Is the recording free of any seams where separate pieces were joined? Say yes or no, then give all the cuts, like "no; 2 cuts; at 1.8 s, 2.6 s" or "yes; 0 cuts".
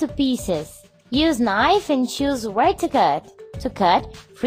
yes; 0 cuts